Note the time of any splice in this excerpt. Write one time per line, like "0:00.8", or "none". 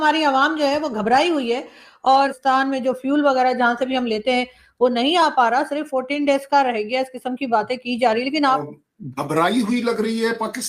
0:02.3
0:08.6

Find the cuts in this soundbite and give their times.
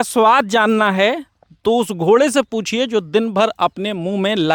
none

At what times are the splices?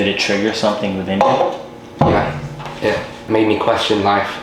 0:03.2

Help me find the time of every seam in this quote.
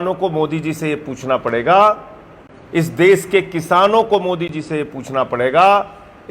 none

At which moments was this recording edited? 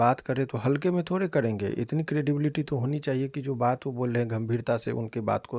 none

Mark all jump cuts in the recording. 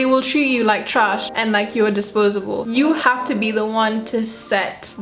0:02.6

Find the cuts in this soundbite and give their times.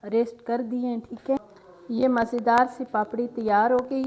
0:01.4

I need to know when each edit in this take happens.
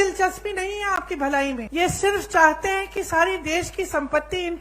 0:01.7

